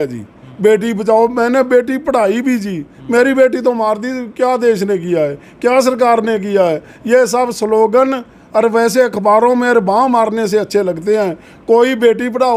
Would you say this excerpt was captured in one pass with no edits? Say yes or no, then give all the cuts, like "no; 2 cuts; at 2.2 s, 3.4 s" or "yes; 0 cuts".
yes; 0 cuts